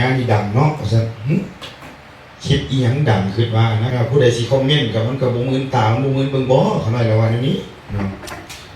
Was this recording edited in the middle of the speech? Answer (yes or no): yes